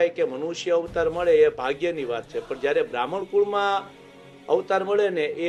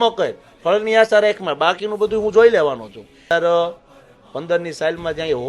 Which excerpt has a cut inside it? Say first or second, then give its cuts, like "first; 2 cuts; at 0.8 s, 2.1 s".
second; 1 cut; at 3.3 s